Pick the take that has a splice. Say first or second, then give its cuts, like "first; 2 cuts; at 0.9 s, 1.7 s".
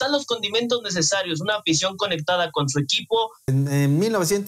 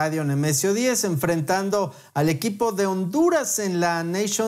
first; 1 cut; at 3.5 s